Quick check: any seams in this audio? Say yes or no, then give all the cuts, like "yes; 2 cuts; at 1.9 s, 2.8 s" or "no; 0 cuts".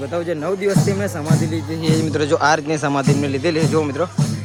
no; 0 cuts